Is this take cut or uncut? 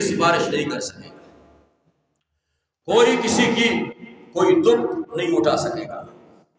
uncut